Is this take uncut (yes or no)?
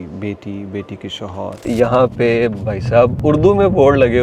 no